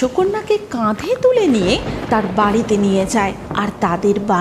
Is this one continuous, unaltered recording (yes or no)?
no